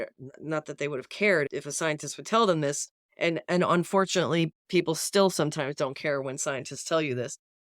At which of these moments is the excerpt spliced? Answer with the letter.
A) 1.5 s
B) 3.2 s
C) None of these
A